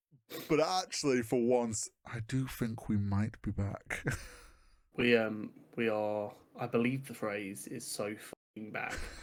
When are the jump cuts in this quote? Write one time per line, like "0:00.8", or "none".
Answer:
none